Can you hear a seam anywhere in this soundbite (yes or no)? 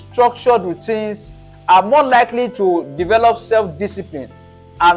no